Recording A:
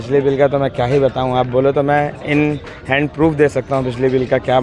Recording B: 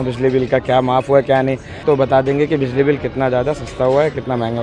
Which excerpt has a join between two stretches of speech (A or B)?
B